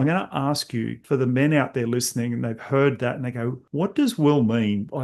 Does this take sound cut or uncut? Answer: cut